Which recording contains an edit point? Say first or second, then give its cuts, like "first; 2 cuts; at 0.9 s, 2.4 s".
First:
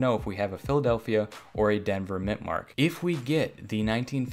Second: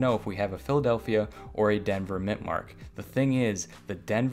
first; 1 cut; at 2.7 s